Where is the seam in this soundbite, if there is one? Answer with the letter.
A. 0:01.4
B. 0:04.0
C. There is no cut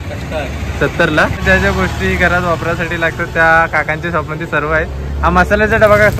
C